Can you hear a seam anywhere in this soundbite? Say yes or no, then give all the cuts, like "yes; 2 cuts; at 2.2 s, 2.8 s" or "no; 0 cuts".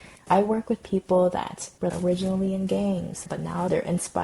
yes; 1 cut; at 1.8 s